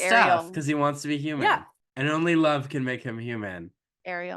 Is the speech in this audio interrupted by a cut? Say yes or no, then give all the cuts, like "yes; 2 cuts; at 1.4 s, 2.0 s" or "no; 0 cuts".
yes; 1 cut; at 1.8 s